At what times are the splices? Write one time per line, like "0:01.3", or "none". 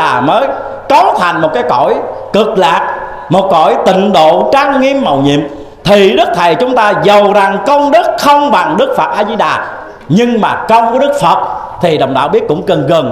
none